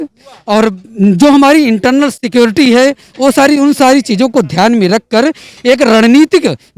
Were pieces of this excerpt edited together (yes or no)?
no